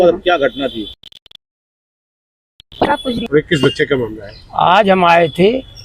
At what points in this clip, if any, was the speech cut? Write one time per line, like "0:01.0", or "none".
0:03.2